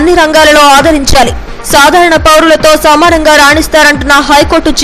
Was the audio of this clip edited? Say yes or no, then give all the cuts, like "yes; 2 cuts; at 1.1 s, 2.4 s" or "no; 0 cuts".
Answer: no; 0 cuts